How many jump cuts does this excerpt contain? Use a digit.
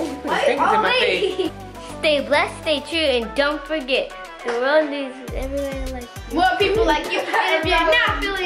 1